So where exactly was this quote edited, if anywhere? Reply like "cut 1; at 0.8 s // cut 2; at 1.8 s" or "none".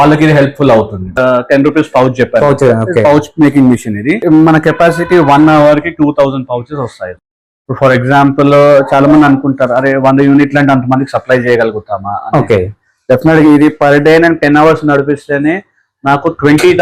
cut 1; at 1.2 s